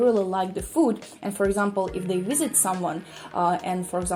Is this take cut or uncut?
uncut